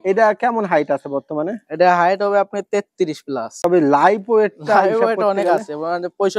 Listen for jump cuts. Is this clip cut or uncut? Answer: cut